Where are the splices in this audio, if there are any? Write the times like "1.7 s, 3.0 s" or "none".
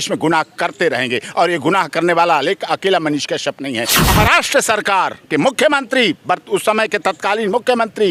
4.1 s